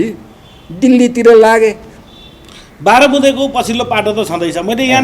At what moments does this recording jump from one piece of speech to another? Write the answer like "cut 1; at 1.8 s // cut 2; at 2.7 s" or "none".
none